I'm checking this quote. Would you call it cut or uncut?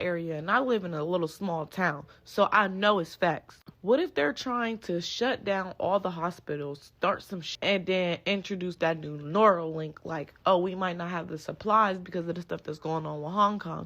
cut